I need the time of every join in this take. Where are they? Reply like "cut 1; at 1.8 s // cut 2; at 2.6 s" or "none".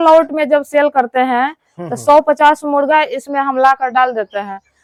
none